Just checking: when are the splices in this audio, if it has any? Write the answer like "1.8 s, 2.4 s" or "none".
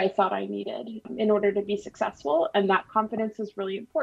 1.1 s